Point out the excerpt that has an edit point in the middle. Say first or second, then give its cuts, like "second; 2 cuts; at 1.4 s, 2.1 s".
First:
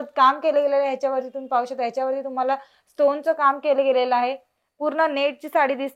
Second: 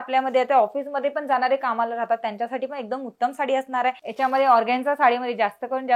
second; 1 cut; at 4.0 s